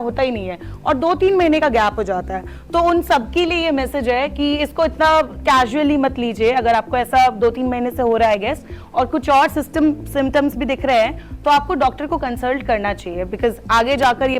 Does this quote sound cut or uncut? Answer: uncut